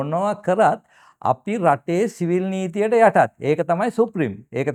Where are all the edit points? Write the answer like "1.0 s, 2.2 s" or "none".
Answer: none